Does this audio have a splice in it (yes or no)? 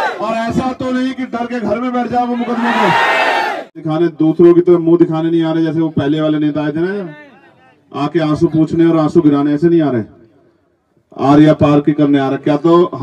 yes